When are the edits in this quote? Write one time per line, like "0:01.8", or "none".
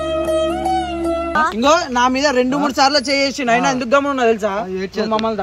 0:01.4